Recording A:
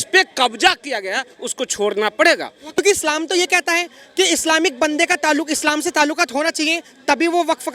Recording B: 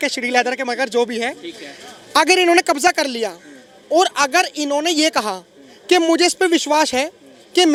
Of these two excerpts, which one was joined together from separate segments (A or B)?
A